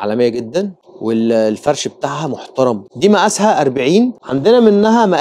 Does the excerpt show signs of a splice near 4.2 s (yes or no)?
no